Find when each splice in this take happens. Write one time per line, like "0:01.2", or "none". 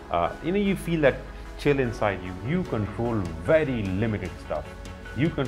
0:02.3

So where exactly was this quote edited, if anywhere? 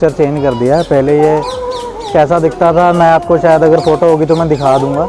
none

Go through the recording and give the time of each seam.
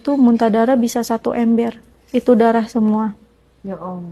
none

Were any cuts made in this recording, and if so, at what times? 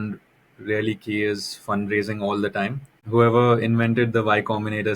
0:03.0

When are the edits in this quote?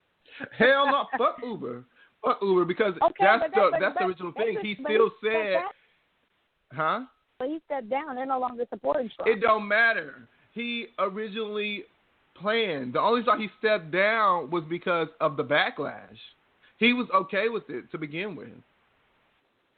none

